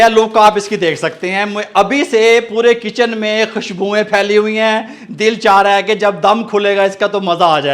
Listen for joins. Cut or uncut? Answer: uncut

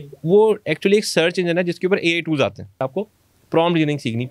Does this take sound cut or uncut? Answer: cut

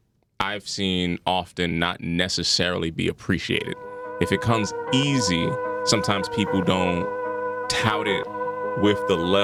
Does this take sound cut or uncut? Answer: uncut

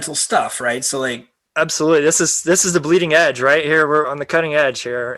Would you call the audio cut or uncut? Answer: cut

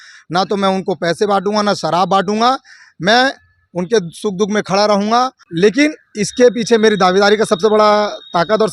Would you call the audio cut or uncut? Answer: cut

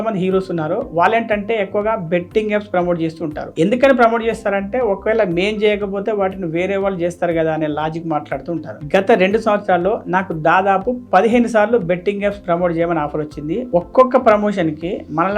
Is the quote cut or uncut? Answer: uncut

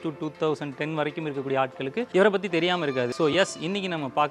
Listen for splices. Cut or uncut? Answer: cut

